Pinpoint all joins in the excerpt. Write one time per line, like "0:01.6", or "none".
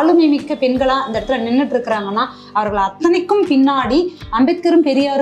none